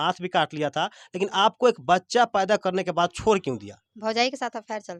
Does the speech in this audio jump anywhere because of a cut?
no; 0 cuts

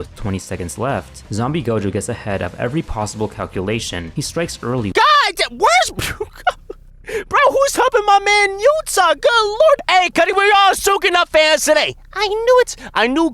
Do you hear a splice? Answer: yes; 1 cut; at 9.5 s

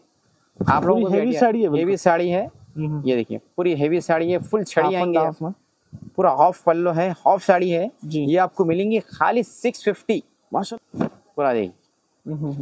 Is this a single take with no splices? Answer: no; 1 cut; at 10.7 s

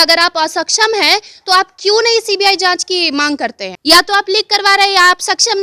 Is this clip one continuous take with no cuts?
no; 1 cut; at 3.7 s

